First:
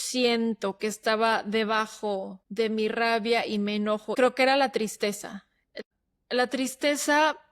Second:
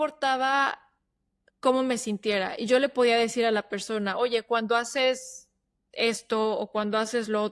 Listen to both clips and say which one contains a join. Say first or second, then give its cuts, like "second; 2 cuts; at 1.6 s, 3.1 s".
first; 3 cuts; at 2.4 s, 4.1 s, 5.7 s